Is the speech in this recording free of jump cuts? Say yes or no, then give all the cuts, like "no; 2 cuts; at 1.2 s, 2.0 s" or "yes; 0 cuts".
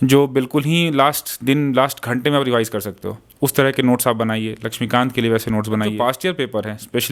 no; 1 cut; at 5.9 s